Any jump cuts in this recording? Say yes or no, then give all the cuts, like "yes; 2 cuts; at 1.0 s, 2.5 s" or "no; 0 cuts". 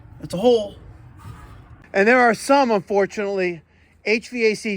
yes; 1 cut; at 1.7 s